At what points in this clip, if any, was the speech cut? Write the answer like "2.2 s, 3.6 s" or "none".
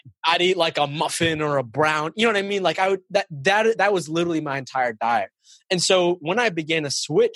none

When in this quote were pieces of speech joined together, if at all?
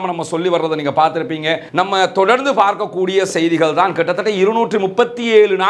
1.6 s

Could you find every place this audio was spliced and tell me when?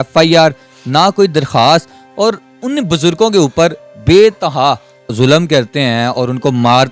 5.1 s

